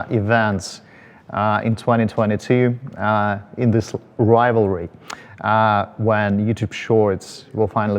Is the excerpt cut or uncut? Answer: uncut